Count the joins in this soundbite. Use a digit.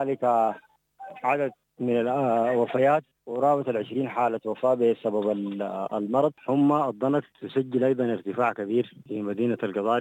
5